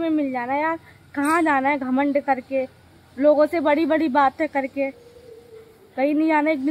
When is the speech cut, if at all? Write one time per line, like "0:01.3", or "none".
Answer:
none